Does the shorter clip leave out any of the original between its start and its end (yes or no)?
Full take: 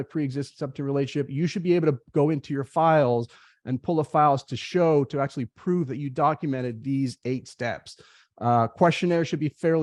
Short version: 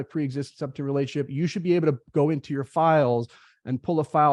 no